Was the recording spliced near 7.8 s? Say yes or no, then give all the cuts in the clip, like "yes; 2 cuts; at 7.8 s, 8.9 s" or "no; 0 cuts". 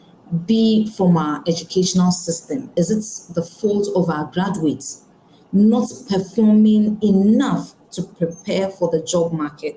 no; 1 cut; at 2.7 s